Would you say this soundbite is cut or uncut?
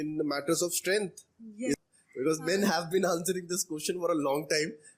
cut